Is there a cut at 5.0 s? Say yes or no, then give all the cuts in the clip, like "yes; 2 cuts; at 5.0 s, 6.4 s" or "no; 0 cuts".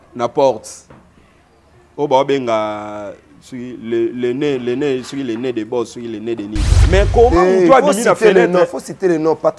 no; 1 cut; at 6.7 s